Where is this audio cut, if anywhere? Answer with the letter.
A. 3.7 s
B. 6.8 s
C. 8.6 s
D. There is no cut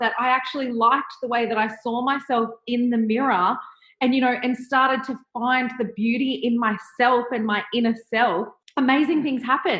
C